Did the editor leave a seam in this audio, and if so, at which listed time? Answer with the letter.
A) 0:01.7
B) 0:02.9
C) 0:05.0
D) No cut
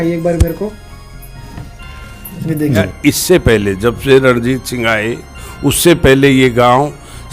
B